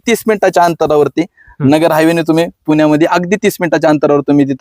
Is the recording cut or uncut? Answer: uncut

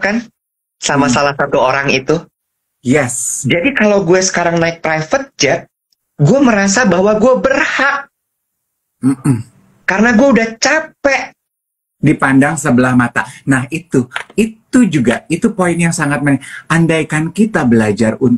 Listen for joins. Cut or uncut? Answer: uncut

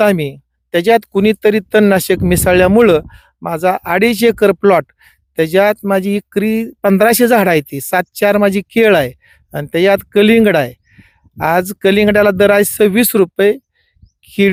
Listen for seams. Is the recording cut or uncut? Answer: uncut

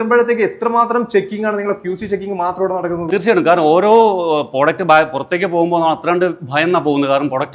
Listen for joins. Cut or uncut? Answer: uncut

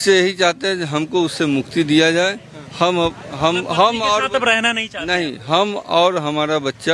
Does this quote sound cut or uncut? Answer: uncut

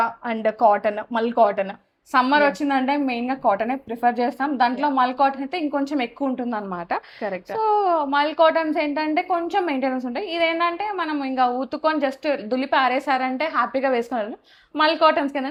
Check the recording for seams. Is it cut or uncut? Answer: uncut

